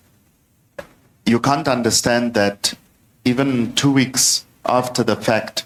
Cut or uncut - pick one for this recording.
uncut